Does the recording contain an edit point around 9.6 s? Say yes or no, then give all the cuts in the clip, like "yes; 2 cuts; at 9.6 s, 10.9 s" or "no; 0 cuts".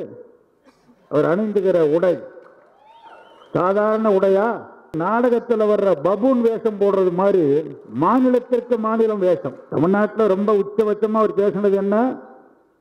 yes; 2 cuts; at 5.0 s, 9.6 s